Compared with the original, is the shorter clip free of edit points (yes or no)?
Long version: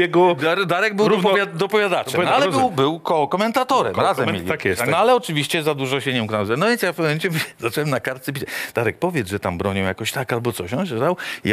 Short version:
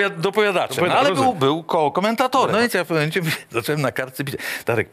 no